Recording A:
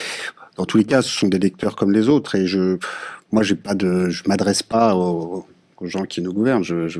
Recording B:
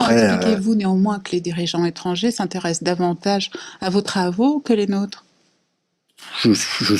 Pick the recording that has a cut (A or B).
A